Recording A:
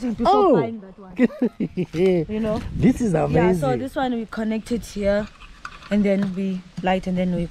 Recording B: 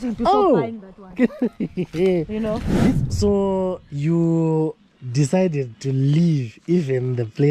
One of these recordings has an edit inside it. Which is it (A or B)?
B